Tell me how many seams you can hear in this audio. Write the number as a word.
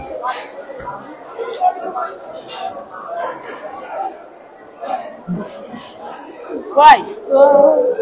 zero